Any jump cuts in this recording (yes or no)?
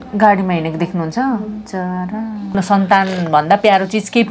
yes